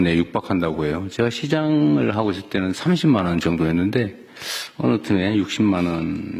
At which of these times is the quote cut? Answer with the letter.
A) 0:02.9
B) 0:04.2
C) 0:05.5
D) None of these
D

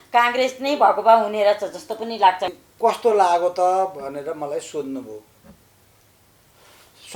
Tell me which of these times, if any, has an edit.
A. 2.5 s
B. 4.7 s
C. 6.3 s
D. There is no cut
A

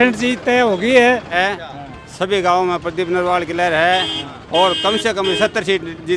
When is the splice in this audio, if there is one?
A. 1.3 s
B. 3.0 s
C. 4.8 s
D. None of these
A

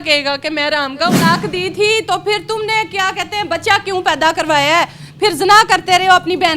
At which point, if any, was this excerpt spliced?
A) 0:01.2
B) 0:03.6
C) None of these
A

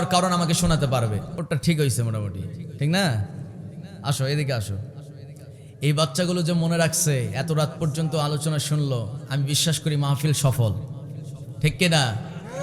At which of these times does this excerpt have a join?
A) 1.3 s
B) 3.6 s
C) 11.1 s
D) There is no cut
A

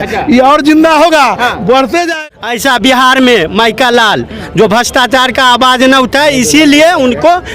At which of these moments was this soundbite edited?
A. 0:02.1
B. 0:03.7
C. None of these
A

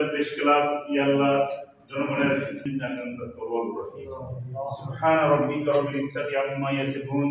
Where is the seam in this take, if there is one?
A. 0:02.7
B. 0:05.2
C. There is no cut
A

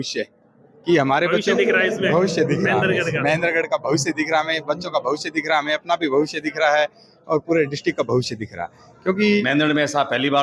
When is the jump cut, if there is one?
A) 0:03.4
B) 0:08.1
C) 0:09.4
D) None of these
C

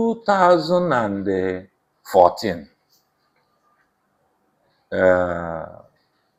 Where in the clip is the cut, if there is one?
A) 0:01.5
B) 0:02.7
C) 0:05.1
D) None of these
D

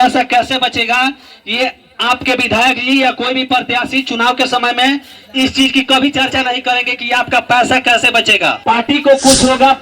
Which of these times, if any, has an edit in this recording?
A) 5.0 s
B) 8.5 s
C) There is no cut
B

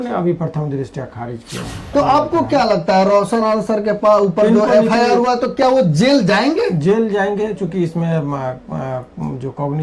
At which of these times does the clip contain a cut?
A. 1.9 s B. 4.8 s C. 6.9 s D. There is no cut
A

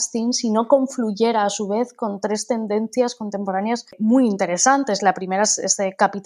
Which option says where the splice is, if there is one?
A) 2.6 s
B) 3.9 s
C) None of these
B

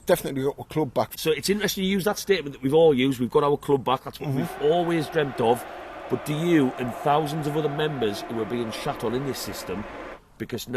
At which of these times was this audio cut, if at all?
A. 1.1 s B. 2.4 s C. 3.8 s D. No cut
A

